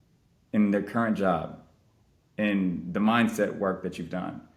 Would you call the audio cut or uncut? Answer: uncut